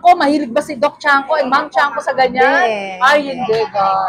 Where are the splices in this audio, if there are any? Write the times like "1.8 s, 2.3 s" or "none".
none